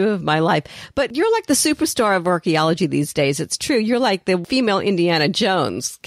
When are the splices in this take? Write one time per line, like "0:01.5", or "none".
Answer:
0:01.1
0:04.4